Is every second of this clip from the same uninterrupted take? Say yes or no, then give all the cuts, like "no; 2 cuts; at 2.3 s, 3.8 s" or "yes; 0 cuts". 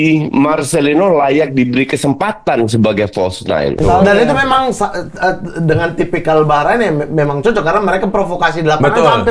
no; 1 cut; at 3.8 s